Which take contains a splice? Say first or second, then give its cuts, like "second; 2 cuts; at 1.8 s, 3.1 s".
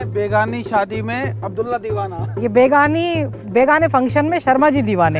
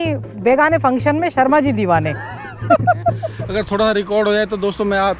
second; 1 cut; at 3.3 s